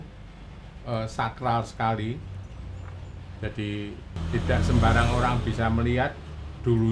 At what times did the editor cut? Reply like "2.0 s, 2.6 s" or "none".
4.2 s